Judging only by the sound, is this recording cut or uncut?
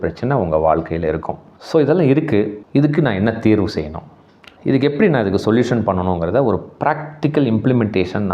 cut